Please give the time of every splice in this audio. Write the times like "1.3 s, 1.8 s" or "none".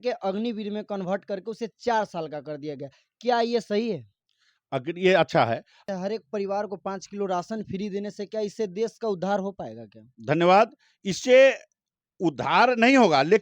5.7 s

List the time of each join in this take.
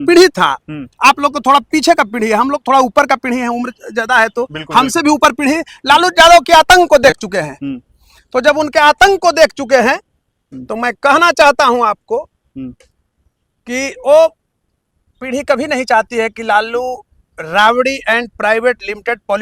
none

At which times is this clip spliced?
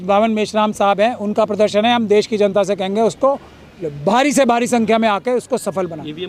none

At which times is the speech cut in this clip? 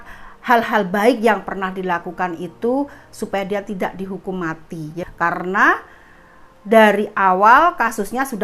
4.9 s

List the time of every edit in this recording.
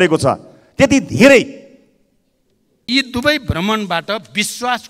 2.9 s

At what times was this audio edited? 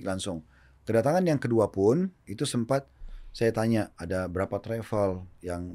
2.2 s

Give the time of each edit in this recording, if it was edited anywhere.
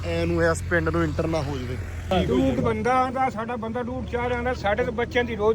2.1 s

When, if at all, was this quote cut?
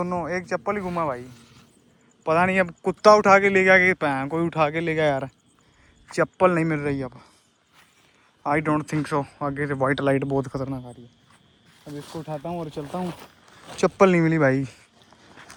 none

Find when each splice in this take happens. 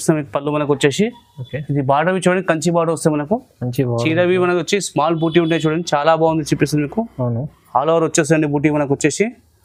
none

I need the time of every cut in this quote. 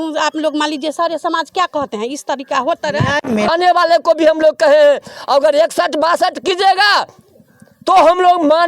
3.5 s

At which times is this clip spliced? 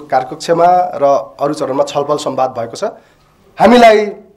3.0 s

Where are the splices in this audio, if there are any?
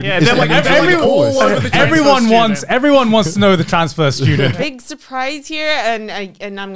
4.5 s

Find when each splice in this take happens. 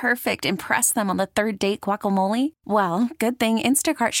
none

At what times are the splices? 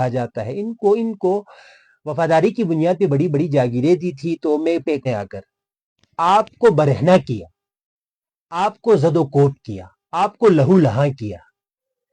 5.1 s

